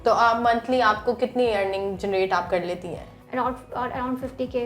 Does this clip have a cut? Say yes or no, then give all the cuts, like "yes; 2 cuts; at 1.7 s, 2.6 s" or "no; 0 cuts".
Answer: yes; 1 cut; at 3.1 s